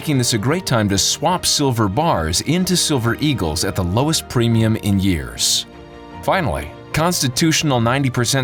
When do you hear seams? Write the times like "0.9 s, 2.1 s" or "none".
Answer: none